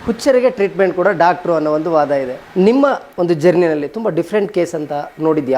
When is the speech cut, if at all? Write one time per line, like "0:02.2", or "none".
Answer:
0:02.4
0:03.1